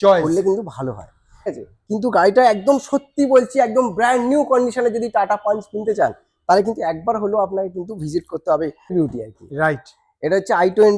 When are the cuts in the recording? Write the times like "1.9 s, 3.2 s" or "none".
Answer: 1.5 s, 8.9 s